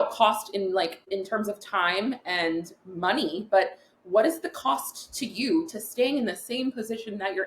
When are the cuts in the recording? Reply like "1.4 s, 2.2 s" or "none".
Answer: 1.0 s